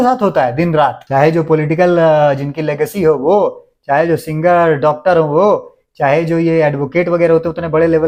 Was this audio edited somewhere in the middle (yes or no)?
no